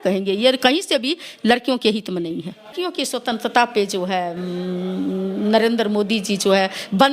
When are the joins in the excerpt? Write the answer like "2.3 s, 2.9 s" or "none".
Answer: 2.7 s